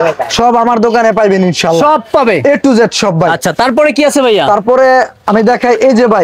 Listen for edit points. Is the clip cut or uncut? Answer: uncut